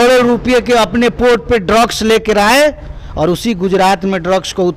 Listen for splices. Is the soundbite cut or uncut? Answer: uncut